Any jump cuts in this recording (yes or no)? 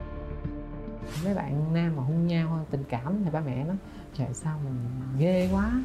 yes